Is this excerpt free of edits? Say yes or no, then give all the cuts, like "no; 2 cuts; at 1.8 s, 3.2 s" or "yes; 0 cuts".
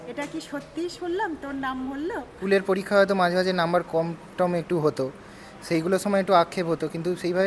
no; 1 cut; at 2.3 s